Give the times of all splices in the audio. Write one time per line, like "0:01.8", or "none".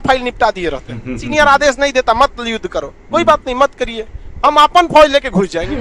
0:01.3